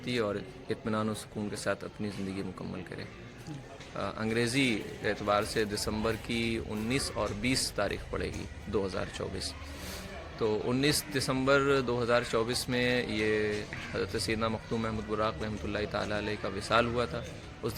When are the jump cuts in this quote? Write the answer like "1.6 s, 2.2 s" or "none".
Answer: 3.6 s